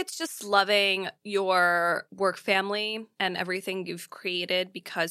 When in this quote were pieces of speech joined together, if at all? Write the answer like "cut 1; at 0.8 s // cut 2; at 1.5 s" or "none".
cut 1; at 1.1 s // cut 2; at 2.1 s // cut 3; at 3.1 s

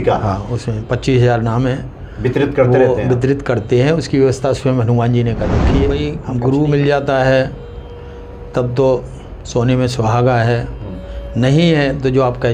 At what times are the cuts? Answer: cut 1; at 5.9 s

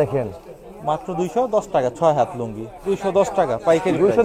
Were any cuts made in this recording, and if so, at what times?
cut 1; at 2.9 s

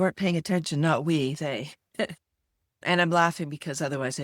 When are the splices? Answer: cut 1; at 2.8 s

